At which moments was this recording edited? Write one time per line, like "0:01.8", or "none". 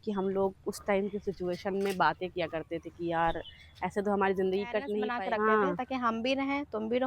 0:05.1